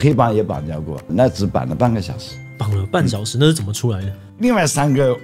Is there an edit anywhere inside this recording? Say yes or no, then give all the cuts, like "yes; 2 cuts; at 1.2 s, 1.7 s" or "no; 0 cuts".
no; 0 cuts